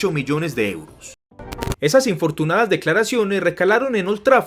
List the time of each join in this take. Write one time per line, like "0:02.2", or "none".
0:01.4